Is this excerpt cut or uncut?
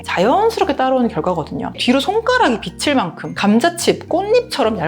cut